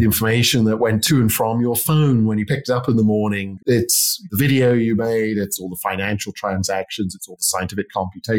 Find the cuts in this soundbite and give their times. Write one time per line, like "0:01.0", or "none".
0:03.8
0:05.6

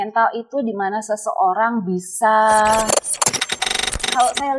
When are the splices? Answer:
0:03.5

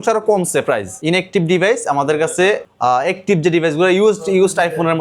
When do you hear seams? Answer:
0:00.9
0:02.7

